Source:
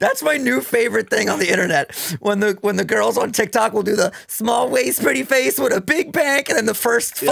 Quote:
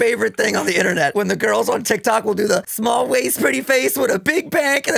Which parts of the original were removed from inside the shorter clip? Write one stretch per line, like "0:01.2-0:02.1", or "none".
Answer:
0:01.9-0:02.6
0:04.2-0:04.3